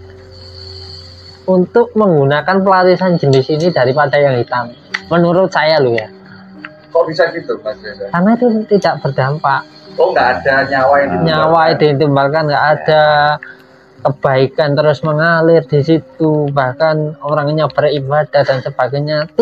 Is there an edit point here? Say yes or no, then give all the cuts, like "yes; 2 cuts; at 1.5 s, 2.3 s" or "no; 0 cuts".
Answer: no; 0 cuts